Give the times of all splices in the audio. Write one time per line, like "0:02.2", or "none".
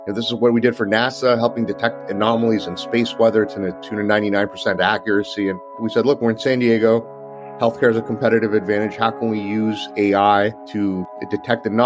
0:05.8
0:11.0